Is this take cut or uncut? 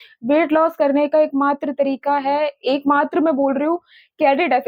uncut